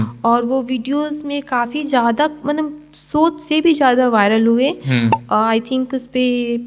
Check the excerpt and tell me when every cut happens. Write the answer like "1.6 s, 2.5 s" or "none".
none